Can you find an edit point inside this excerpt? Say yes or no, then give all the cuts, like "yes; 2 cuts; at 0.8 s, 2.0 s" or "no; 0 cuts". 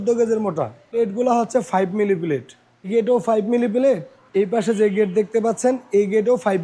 yes; 3 cuts; at 0.9 s, 2.9 s, 4.1 s